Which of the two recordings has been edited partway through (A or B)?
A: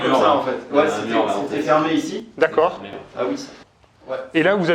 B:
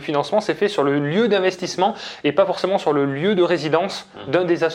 A